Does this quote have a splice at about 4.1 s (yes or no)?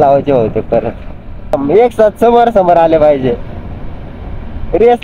no